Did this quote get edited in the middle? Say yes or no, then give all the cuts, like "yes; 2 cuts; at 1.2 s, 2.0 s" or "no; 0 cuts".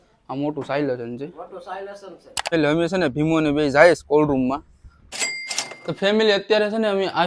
yes; 2 cuts; at 2.4 s, 5.3 s